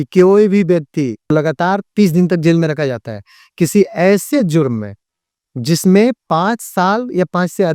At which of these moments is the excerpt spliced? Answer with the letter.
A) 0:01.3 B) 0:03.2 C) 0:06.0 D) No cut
A